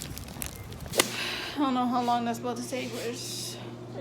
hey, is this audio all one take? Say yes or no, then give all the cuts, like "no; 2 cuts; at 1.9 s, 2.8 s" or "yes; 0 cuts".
no; 1 cut; at 1.0 s